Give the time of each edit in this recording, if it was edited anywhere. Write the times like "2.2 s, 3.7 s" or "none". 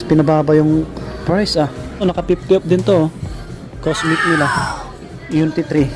2.0 s